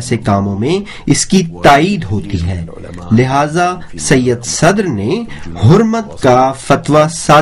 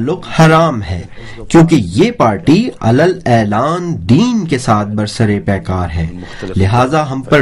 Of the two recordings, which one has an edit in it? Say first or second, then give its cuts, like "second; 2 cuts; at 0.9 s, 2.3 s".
second; 1 cut; at 2.5 s